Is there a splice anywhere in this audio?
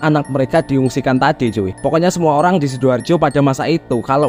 no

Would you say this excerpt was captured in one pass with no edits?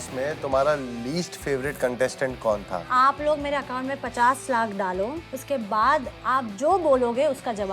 no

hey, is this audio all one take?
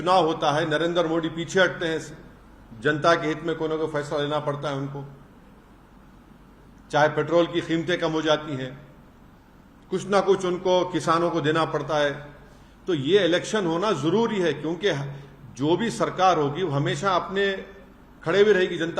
yes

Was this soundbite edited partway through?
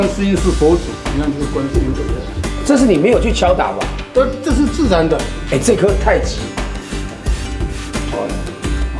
no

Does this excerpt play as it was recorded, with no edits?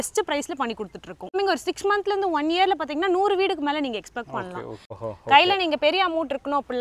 no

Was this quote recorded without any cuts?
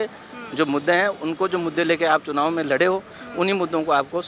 yes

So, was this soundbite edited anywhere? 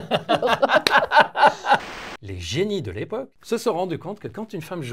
yes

